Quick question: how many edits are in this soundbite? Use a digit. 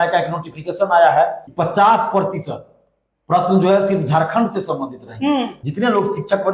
2